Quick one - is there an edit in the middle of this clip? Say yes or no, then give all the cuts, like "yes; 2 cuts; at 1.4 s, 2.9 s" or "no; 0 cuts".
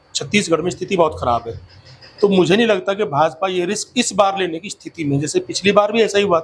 no; 0 cuts